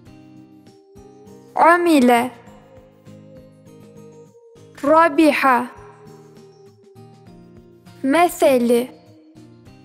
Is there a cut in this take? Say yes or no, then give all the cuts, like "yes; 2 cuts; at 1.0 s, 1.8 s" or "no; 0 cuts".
no; 0 cuts